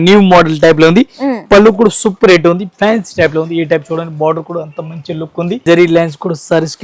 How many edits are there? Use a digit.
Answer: 1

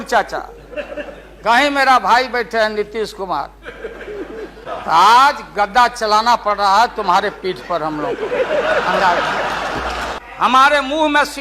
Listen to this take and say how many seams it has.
2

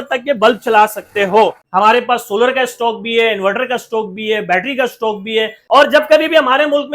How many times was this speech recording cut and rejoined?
2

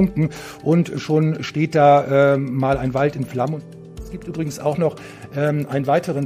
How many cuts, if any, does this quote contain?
1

